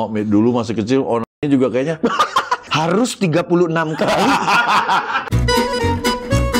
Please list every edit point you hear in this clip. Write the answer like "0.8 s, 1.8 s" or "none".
2.6 s, 5.2 s